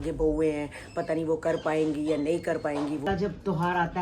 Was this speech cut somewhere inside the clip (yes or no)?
yes